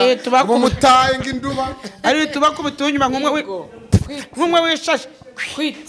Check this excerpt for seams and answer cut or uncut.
uncut